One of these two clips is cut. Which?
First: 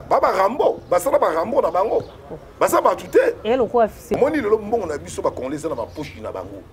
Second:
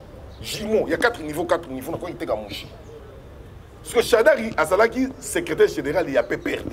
first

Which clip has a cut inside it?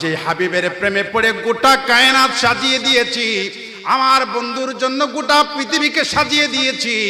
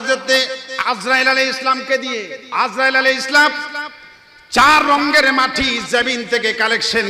second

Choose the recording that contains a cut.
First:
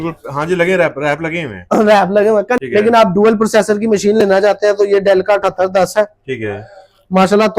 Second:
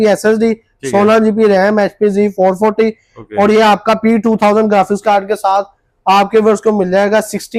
first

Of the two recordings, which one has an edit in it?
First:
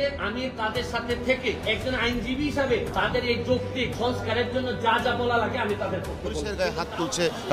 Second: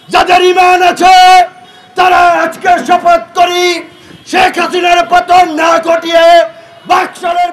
first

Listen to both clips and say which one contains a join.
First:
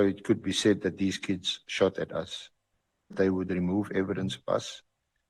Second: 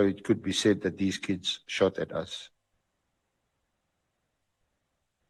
first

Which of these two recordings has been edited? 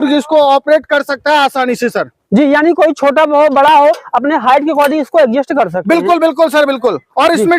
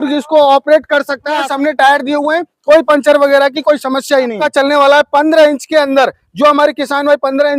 second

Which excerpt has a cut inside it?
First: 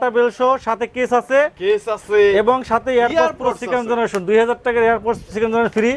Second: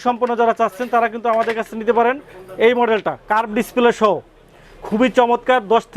second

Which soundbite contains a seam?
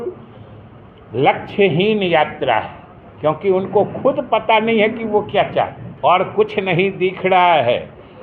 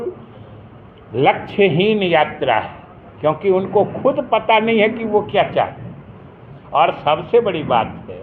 first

